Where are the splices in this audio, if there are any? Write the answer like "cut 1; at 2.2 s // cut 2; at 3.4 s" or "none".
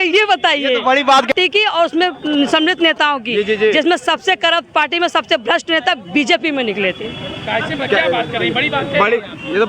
cut 1; at 1.3 s